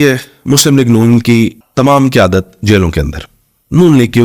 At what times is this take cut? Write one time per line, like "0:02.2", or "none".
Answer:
0:01.6